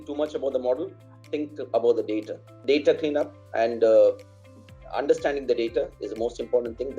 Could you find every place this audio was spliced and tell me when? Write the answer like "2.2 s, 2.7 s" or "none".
2.6 s

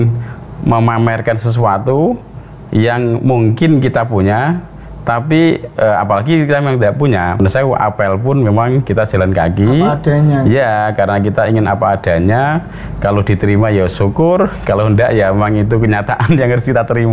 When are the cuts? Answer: 7.4 s

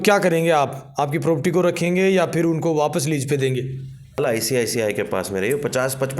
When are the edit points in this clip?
4.2 s

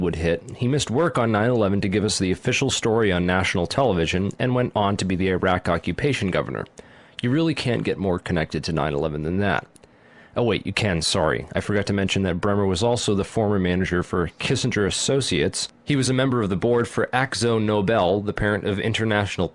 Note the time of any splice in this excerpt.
8.0 s

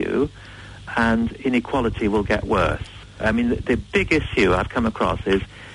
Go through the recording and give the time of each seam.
3.2 s

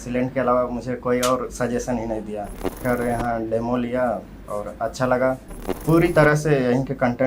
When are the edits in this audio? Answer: 2.8 s, 5.7 s

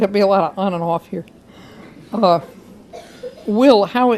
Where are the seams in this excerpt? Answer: 2.0 s

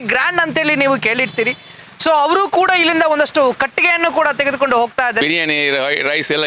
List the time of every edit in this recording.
5.2 s

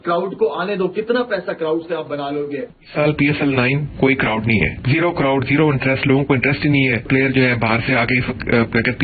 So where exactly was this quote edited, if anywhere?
2.8 s

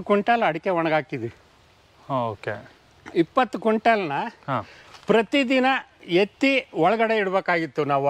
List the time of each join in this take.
none

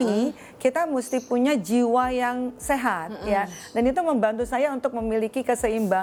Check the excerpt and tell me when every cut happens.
none

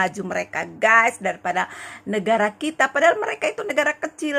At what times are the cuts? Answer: none

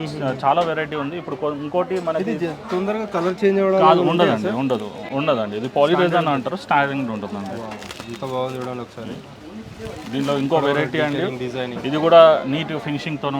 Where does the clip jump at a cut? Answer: none

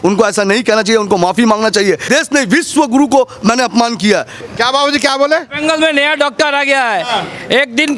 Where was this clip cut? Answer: 2.0 s, 4.4 s

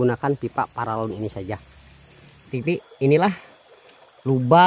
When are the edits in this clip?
2.6 s

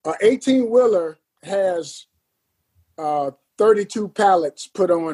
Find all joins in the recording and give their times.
1.3 s

